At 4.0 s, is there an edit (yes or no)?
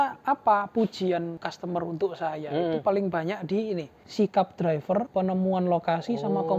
yes